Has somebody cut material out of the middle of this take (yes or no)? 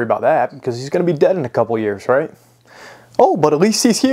no